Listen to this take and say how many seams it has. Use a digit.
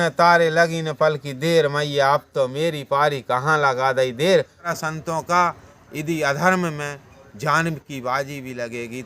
1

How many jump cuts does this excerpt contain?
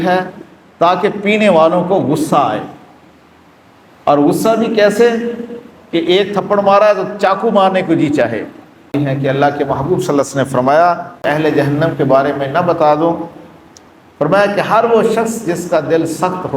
2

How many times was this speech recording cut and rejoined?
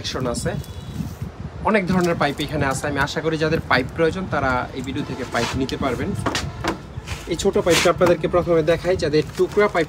0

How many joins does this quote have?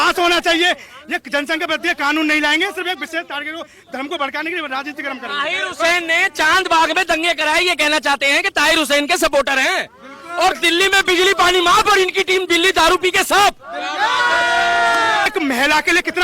1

